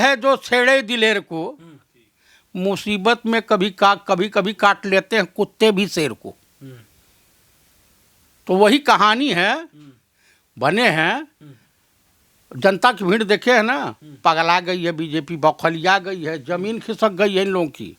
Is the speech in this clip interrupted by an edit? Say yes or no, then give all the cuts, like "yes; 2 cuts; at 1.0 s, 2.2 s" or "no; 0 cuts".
no; 0 cuts